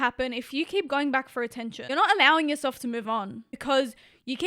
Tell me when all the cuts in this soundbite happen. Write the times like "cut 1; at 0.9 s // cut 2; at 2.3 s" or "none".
cut 1; at 1.8 s // cut 2; at 3.5 s